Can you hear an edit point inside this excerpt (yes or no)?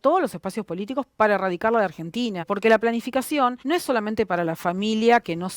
yes